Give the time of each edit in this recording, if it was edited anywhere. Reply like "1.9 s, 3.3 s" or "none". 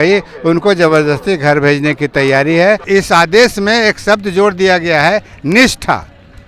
2.8 s